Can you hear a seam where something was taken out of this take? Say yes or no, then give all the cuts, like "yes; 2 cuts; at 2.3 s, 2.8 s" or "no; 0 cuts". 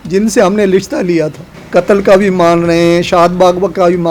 yes; 1 cut; at 1.6 s